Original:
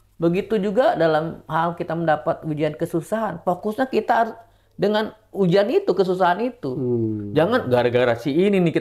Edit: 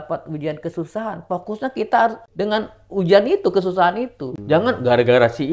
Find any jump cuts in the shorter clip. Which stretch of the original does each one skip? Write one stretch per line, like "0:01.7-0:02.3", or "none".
0:04.4-0:04.7
0:06.8-0:07.2